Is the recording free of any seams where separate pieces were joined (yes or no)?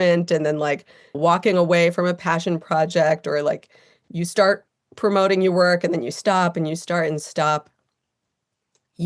no